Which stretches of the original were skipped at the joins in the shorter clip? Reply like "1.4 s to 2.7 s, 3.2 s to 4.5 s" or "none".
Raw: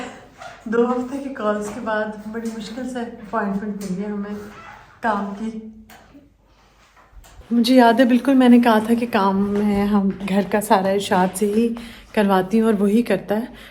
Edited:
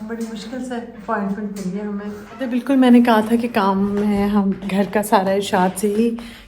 4.8 s to 8.1 s